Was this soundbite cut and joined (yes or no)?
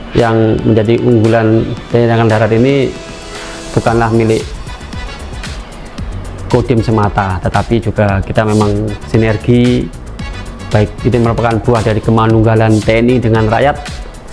no